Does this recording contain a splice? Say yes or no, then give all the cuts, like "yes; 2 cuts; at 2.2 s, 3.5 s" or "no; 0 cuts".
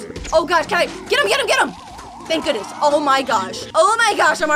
yes; 1 cut; at 3.6 s